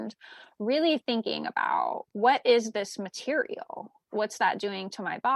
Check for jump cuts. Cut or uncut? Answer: cut